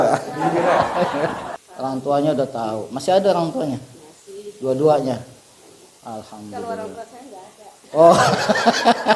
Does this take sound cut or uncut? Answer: cut